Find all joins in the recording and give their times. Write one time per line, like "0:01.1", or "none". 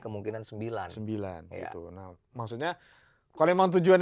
none

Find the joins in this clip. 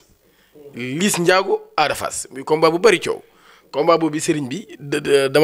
none

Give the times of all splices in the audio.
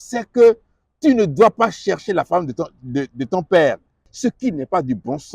0:04.0

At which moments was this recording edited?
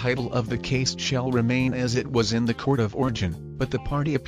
0:01.2

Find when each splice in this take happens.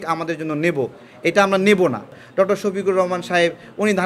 0:02.2

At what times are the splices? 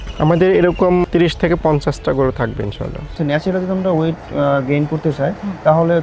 0:03.1

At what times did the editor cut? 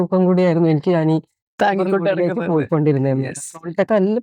none

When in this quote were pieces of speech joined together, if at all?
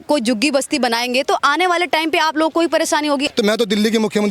0:03.3

